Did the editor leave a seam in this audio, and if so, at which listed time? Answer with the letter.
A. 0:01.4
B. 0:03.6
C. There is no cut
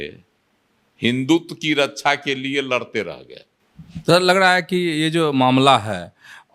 B